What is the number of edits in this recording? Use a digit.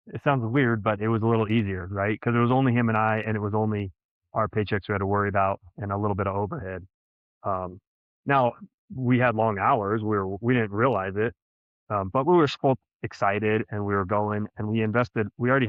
0